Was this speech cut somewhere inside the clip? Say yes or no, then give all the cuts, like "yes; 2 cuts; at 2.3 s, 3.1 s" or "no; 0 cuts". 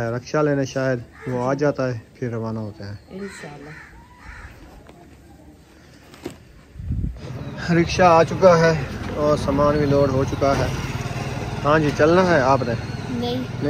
no; 0 cuts